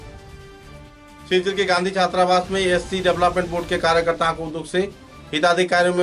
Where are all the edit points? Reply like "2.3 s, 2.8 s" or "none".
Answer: 1.3 s